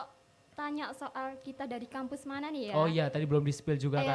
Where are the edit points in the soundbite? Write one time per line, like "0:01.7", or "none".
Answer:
none